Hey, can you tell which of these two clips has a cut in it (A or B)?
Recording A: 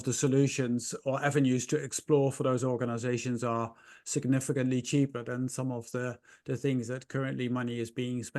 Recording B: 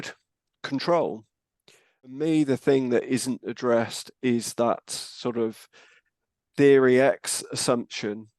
B